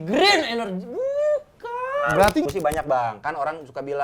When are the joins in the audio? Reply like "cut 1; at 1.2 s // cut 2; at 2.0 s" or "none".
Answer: cut 1; at 2.4 s

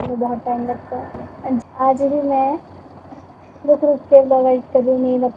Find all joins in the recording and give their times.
cut 1; at 1.6 s

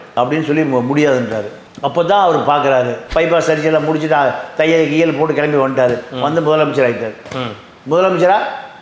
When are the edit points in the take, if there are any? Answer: cut 1; at 3.0 s

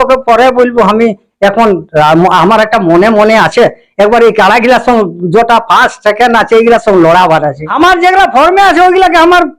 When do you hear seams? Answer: cut 1; at 7.7 s

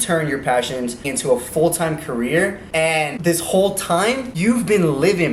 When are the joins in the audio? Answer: cut 1; at 1.1 s // cut 2; at 2.9 s // cut 3; at 4.3 s

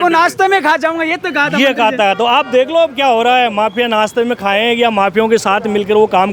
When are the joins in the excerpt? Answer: none

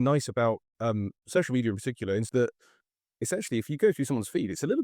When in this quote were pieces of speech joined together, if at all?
cut 1; at 2.3 s

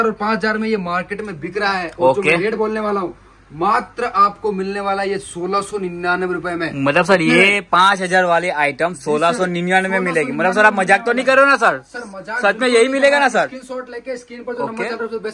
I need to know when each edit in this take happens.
none

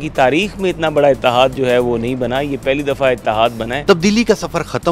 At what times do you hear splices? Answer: cut 1; at 3.8 s

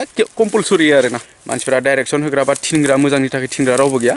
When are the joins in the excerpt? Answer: cut 1; at 1.3 s

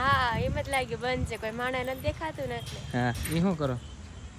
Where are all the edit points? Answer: cut 1; at 3.3 s

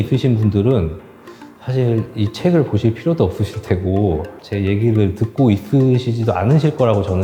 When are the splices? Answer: none

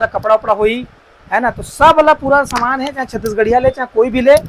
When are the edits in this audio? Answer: none

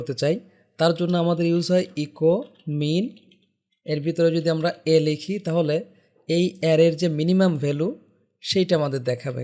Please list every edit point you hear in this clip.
none

